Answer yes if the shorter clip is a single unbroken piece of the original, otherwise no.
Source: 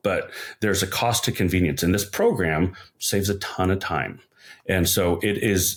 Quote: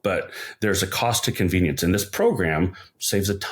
yes